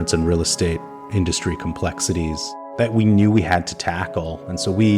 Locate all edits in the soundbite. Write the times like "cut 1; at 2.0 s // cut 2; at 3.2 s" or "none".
cut 1; at 2.6 s